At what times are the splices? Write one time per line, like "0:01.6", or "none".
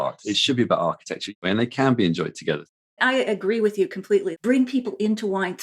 0:01.3
0:02.8
0:04.3